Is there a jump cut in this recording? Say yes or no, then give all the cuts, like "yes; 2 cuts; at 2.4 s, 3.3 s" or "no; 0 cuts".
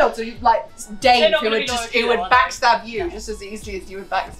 no; 0 cuts